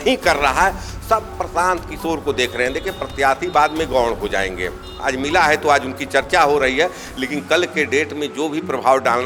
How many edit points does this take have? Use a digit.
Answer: 0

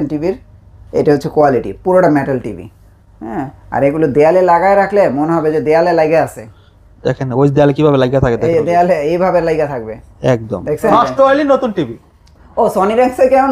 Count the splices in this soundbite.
1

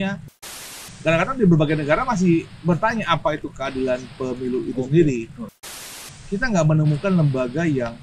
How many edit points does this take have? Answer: 2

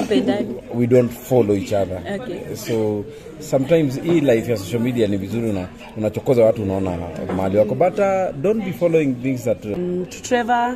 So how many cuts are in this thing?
1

